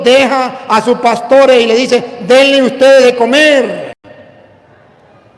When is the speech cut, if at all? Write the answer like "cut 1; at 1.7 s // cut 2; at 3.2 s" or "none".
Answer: none